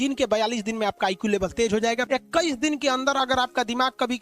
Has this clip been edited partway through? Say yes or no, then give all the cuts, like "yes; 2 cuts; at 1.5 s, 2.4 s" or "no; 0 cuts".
yes; 1 cut; at 2.0 s